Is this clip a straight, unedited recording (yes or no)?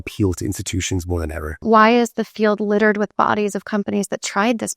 no